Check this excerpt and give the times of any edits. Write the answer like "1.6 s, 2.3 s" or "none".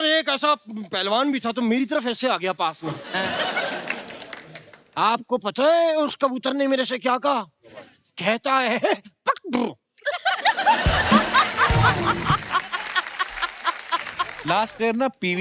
14.4 s